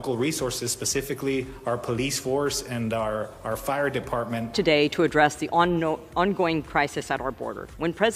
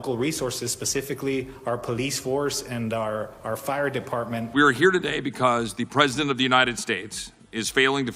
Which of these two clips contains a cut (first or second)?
second